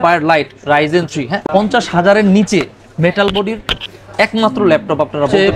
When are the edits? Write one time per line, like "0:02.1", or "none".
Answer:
0:01.4